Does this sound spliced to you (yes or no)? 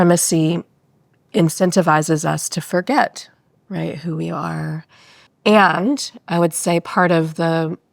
yes